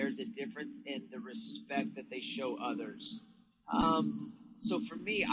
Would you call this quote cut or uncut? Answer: uncut